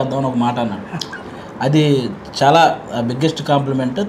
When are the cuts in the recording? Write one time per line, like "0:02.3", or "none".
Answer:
none